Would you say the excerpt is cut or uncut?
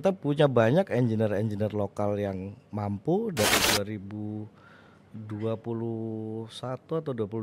cut